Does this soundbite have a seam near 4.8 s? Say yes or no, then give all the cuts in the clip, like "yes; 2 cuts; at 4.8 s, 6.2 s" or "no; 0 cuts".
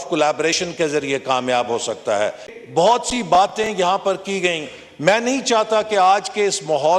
no; 1 cut; at 2.5 s